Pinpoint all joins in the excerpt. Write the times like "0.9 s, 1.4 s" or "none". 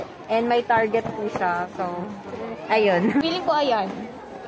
3.2 s

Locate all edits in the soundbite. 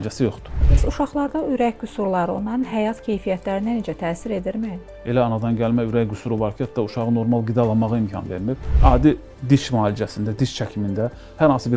0.8 s, 4.9 s, 8.7 s

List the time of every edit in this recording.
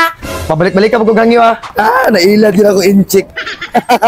1.6 s

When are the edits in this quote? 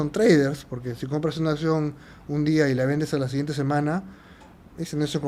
none

